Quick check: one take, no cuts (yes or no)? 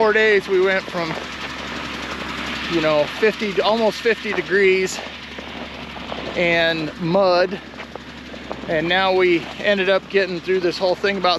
yes